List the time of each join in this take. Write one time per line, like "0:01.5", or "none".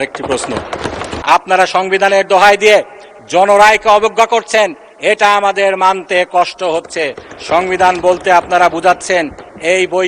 0:01.1